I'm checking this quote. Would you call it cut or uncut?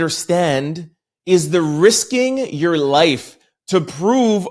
uncut